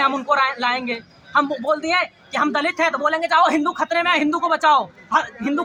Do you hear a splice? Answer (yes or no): no